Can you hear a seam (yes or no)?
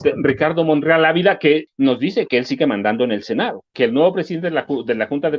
yes